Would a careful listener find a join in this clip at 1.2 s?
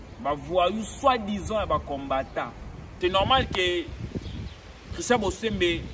no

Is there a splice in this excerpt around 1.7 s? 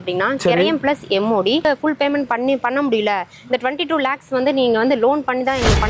yes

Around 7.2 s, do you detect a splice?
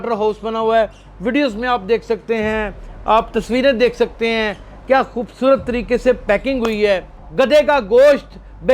yes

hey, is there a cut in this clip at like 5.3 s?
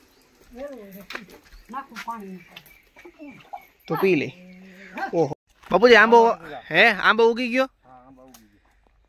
yes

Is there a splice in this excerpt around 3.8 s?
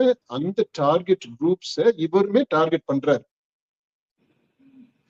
no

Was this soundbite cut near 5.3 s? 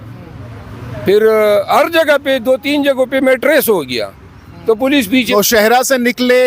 yes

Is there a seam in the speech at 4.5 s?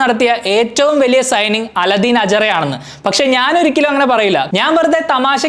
yes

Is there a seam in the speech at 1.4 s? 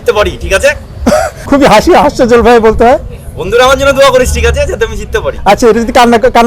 yes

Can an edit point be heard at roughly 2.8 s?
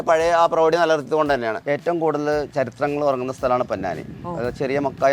no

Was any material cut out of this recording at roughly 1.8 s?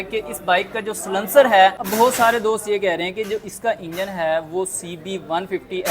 yes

